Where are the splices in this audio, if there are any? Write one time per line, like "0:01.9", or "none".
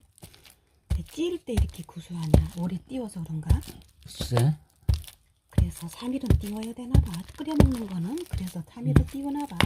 0:02.5